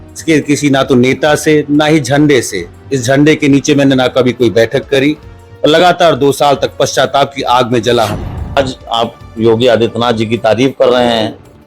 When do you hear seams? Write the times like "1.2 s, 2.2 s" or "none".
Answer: 8.6 s